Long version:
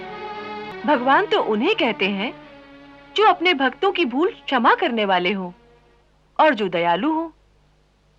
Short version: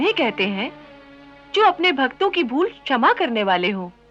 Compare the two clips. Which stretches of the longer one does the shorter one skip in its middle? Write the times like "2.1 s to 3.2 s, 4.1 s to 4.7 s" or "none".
none